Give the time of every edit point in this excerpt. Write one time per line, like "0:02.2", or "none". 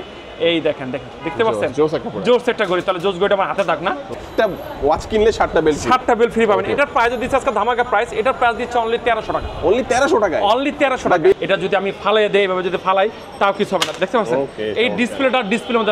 0:04.2
0:11.3